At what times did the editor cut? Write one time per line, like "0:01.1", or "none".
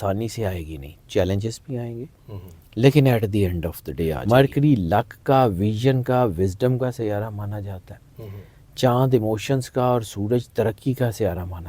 0:04.2